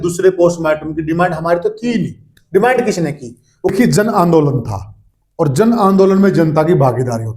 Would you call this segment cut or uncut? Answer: cut